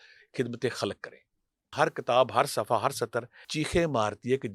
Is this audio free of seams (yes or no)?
no